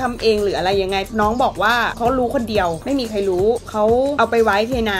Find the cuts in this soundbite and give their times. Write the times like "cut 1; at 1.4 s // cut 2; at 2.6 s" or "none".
cut 1; at 1.1 s // cut 2; at 2.0 s // cut 3; at 2.8 s // cut 4; at 4.0 s

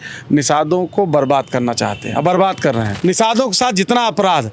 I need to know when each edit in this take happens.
cut 1; at 2.9 s

